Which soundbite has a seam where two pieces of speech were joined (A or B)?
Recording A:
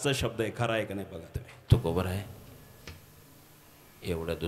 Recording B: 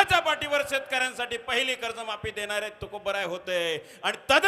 A